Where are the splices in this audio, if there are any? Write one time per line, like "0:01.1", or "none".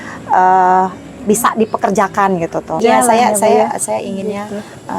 0:02.8